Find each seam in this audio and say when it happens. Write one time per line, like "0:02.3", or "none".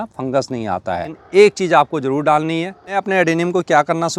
0:01.2
0:02.9